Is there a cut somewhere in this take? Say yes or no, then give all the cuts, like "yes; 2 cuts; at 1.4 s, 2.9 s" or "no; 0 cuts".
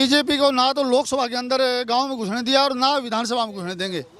no; 0 cuts